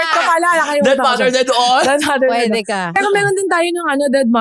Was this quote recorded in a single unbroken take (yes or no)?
no